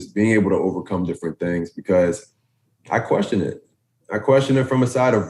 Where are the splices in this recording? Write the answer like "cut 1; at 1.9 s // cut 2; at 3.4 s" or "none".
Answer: none